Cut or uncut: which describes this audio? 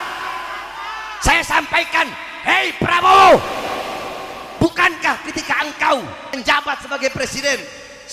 cut